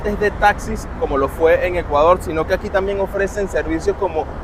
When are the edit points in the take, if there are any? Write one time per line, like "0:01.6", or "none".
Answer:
none

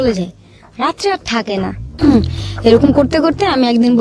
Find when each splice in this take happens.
0:01.8

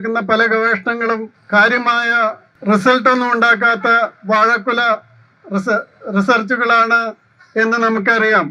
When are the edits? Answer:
0:01.4
0:02.5

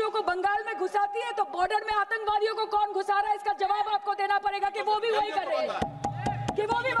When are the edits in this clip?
none

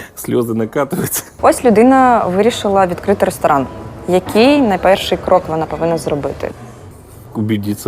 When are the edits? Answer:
0:01.2

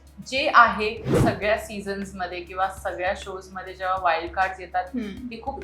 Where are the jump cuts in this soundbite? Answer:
0:01.1

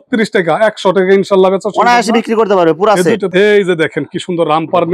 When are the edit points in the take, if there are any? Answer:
0:03.3

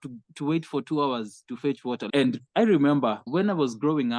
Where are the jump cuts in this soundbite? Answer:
none

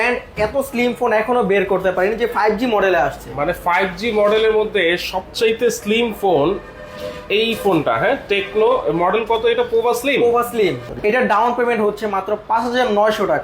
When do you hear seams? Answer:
0:10.8

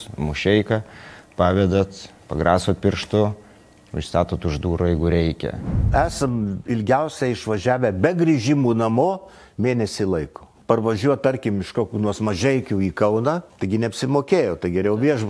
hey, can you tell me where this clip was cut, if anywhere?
0:05.8
0:10.6
0:13.5

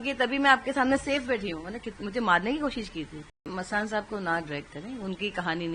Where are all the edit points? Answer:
0:03.5

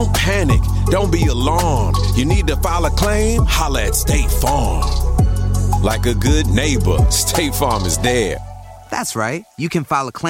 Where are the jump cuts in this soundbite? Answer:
none

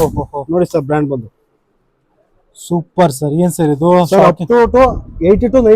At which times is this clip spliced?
none

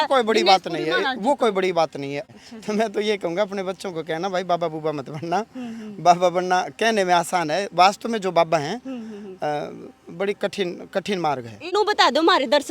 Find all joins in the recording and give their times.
0:02.2
0:11.7

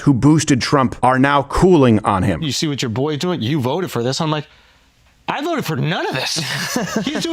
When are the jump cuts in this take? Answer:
0:00.9
0:02.4

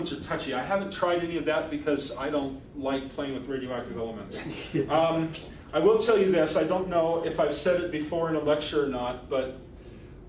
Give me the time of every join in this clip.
0:09.2

